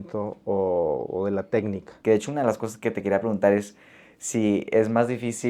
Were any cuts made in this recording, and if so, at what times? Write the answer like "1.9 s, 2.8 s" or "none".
1.9 s